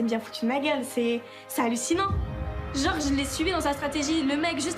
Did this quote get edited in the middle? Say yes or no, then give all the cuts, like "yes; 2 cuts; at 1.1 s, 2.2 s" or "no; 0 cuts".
no; 0 cuts